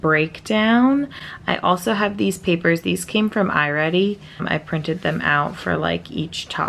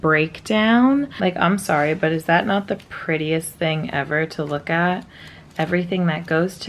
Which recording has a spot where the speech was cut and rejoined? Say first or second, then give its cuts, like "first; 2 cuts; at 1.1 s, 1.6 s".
second; 1 cut; at 1.1 s